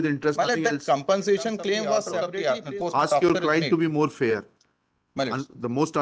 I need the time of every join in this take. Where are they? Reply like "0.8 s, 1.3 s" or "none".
2.2 s